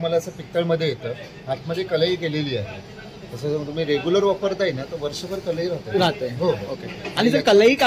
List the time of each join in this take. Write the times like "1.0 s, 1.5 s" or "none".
none